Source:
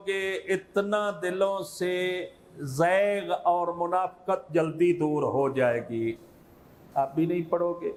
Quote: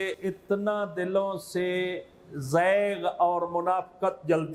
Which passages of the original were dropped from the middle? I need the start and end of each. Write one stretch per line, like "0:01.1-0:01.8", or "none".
none